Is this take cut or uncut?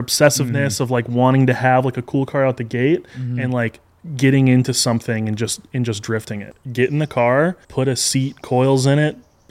cut